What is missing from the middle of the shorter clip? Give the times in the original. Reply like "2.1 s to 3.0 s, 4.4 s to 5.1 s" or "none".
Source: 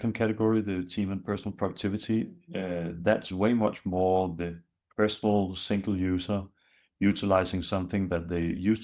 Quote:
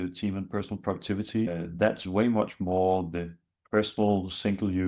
2.2 s to 2.8 s